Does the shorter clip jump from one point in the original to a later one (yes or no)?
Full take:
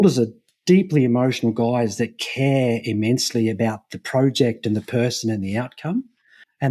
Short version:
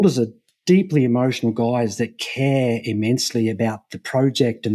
no